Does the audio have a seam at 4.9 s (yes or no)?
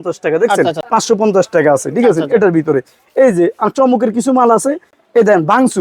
yes